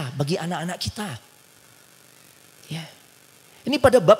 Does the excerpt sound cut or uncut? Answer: uncut